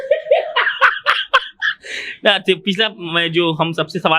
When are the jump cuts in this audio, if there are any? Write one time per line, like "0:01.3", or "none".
none